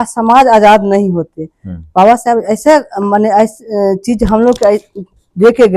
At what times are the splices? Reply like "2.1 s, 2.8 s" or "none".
none